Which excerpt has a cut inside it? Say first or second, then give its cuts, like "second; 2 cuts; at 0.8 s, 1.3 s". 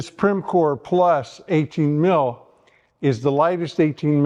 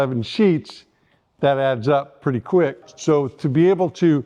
second; 1 cut; at 2.9 s